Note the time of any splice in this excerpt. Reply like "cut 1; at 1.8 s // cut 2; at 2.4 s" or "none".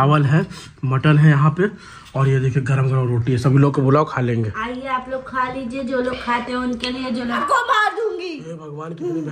cut 1; at 7.4 s